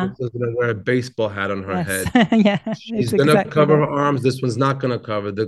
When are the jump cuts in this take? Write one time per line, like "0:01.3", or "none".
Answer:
none